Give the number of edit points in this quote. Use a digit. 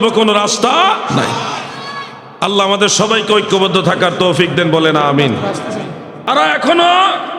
1